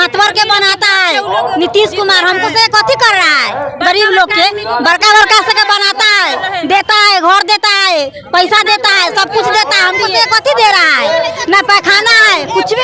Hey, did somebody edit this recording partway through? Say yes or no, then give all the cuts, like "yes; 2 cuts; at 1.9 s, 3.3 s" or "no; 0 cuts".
no; 0 cuts